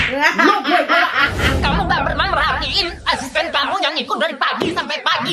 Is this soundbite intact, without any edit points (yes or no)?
yes